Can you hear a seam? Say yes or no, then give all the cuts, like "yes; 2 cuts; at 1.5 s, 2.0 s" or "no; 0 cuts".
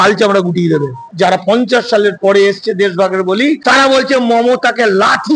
yes; 1 cut; at 1.1 s